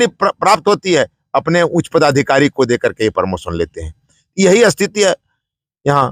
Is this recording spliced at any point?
no; 0 cuts

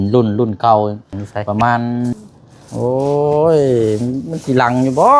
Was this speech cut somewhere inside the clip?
yes; 1 cut; at 2.1 s

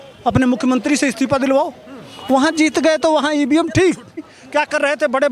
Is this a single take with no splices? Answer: no; 1 cut; at 4.4 s

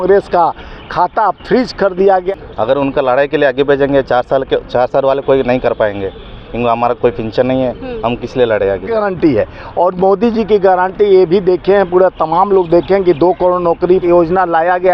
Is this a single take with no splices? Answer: no; 3 cuts; at 2.3 s, 8.9 s, 14.0 s

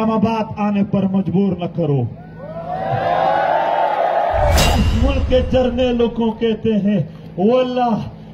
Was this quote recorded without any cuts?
no; 1 cut; at 4.8 s

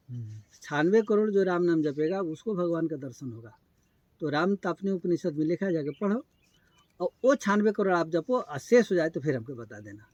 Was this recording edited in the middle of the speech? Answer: no; 0 cuts

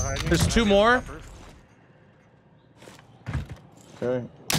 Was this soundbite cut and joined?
no; 0 cuts

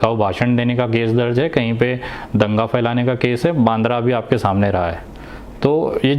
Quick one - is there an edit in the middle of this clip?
no; 0 cuts

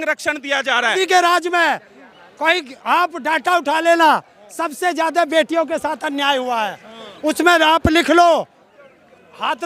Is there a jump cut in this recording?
yes; 1 cut; at 0.9 s

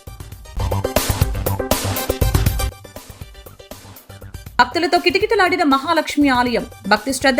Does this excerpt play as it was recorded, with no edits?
no; 1 cut; at 4.5 s

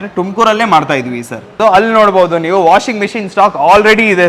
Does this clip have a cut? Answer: yes; 1 cut; at 1.5 s

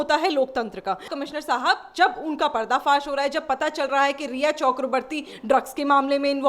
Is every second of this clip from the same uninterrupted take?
no; 1 cut; at 1.0 s

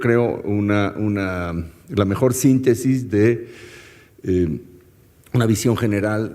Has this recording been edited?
yes; 1 cut; at 4.6 s

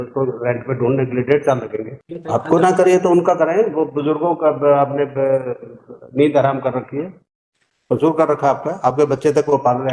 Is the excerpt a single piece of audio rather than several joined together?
no; 1 cut; at 2.1 s

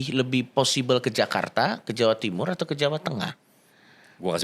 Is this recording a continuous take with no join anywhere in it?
yes; 0 cuts

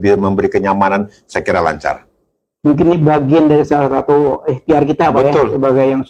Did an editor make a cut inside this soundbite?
no; 0 cuts

